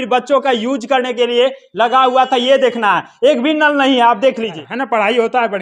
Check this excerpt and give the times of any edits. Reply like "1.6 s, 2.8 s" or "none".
4.7 s